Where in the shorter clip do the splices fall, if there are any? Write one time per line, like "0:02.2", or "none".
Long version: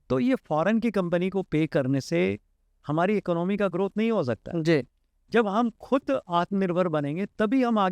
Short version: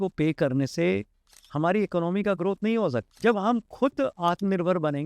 0:03.1